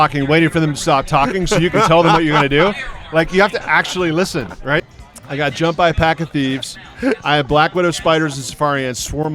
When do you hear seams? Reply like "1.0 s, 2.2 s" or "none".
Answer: 4.8 s